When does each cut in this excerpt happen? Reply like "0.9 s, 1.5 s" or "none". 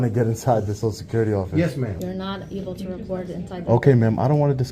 1.0 s, 2.0 s, 3.1 s